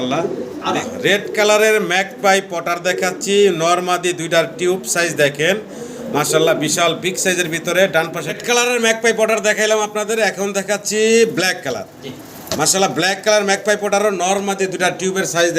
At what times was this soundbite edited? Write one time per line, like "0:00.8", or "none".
0:00.8
0:08.2